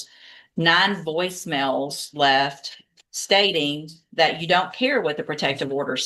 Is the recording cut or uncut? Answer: uncut